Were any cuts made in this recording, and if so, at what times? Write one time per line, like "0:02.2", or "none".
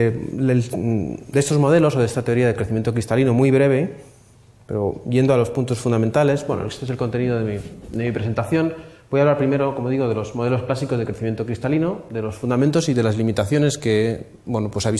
none